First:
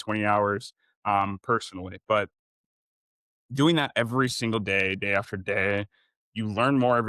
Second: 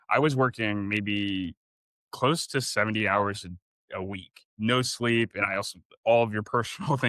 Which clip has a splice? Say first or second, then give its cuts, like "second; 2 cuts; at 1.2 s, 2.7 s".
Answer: second; 1 cut; at 4.4 s